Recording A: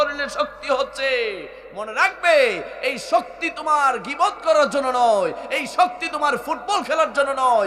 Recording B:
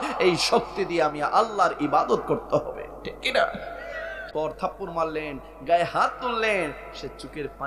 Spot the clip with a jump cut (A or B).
B